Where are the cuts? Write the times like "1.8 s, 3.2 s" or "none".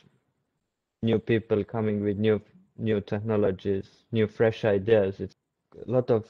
5.3 s